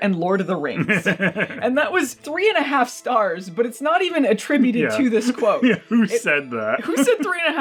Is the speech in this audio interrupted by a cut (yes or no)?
no